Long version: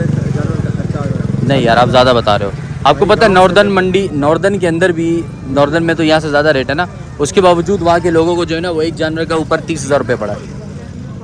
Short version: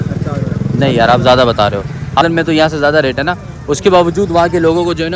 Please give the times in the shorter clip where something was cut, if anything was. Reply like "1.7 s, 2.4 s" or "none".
2.2 s

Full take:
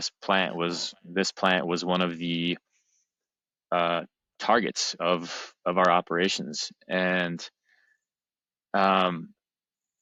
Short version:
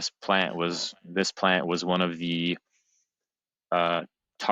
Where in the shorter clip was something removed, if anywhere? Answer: none

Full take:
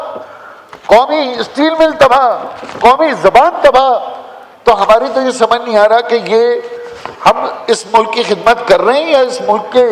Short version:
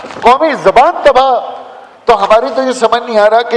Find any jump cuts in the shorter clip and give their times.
none

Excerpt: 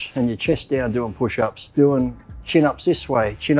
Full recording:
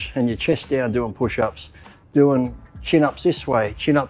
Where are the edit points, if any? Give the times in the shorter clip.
1.6 s

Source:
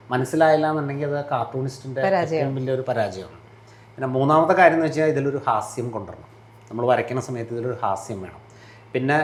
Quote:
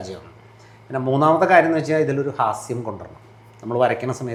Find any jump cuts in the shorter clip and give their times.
none

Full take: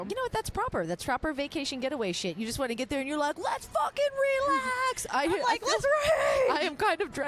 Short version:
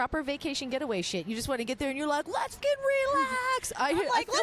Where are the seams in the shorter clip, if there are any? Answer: 2.6 s

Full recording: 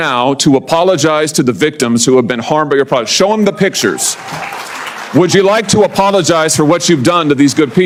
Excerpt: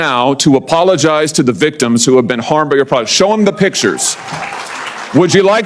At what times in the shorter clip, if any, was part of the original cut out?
none

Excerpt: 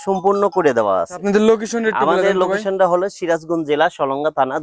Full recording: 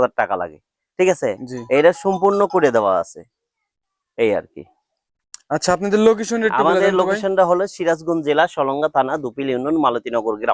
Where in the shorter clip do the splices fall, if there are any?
1.2 s

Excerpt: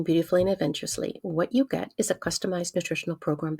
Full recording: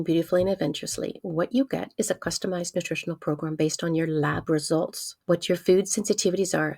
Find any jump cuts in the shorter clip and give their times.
none

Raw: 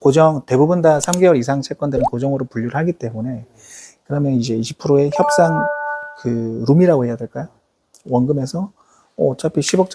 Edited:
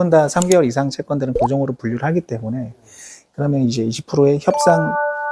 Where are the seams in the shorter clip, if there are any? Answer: none

